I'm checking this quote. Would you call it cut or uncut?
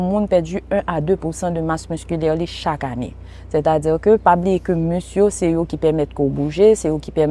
uncut